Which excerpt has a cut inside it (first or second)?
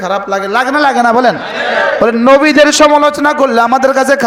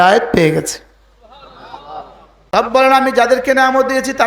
second